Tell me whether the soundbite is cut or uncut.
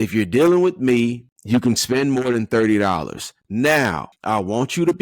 cut